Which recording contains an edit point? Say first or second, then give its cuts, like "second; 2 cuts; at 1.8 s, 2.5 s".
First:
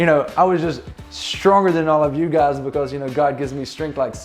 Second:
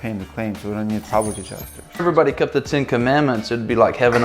second; 1 cut; at 2.0 s